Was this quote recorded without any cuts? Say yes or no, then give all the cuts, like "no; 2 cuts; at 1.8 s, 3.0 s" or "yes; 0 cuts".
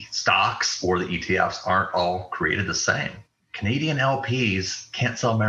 no; 1 cut; at 3.3 s